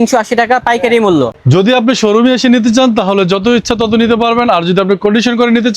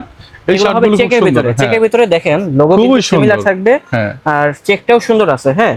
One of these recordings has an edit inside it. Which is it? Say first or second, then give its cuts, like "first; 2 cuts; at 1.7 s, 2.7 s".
first; 1 cut; at 1.3 s